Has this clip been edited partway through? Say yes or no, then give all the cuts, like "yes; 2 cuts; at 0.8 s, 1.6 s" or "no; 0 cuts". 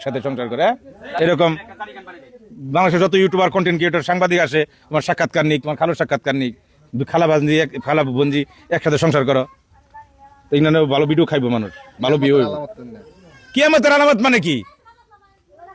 no; 0 cuts